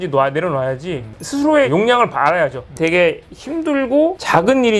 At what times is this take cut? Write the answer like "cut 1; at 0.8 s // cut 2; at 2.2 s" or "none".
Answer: cut 1; at 1.1 s // cut 2; at 2.8 s

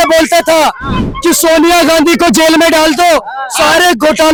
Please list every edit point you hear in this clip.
none

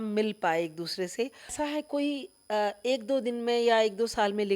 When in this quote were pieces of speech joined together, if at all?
cut 1; at 1.5 s

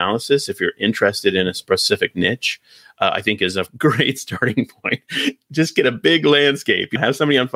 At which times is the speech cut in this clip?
none

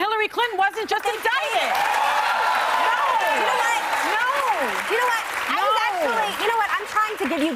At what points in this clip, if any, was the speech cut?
cut 1; at 6.3 s

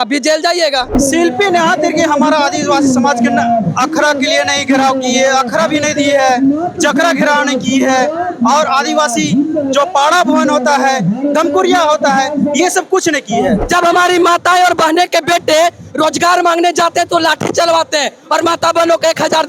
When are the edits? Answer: cut 1; at 0.9 s // cut 2; at 13.6 s

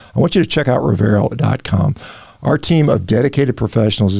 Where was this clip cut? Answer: none

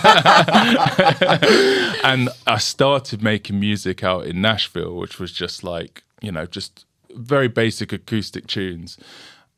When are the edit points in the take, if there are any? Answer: none

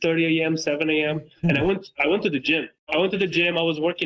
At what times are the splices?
cut 1; at 2.8 s

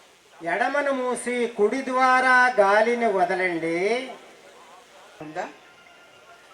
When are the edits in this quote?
cut 1; at 5.2 s

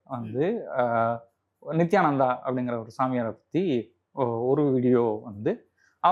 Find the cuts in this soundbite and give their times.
none

